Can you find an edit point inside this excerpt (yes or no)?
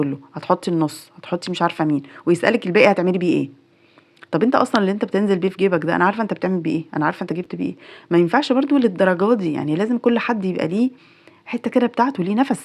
no